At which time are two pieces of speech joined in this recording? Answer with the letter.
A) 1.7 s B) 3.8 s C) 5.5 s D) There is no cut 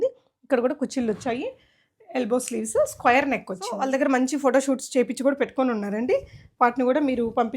B